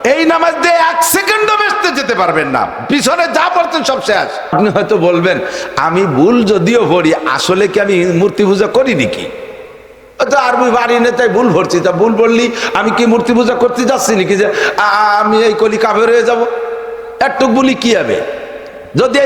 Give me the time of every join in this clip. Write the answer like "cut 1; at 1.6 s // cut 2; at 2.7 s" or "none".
cut 1; at 4.5 s